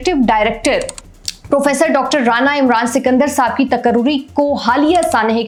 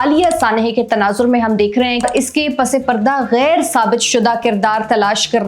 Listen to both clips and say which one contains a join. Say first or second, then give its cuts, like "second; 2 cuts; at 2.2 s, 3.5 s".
second; 1 cut; at 2.0 s